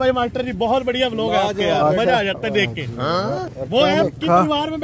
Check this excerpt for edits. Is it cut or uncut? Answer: uncut